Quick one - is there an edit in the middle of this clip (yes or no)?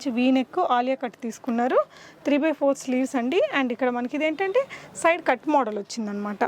no